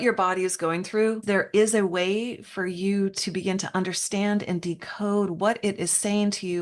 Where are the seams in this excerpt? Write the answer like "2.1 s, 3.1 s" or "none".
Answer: 1.2 s